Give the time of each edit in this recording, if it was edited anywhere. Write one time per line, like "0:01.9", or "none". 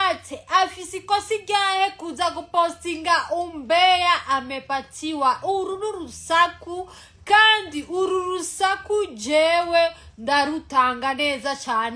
none